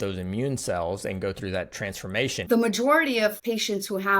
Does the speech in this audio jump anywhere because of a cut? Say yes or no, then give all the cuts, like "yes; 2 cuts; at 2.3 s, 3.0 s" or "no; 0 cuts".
yes; 2 cuts; at 2.4 s, 3.4 s